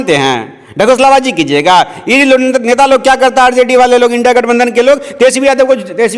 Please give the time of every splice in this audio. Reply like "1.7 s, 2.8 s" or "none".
none